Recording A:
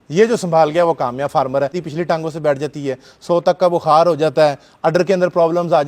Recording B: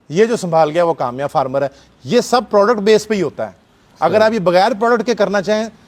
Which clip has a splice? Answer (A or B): A